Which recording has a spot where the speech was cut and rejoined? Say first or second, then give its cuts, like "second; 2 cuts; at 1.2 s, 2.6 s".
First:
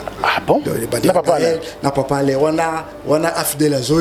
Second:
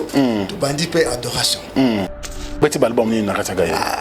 second; 1 cut; at 2.6 s